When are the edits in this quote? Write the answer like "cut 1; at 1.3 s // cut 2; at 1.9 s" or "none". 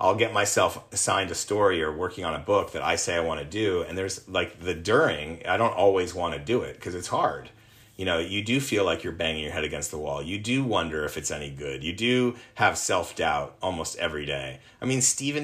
none